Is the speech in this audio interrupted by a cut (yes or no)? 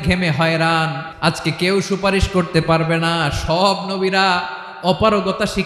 yes